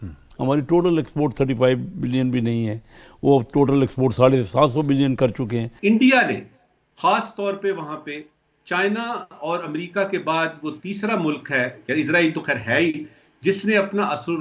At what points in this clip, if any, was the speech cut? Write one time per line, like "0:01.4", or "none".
0:05.7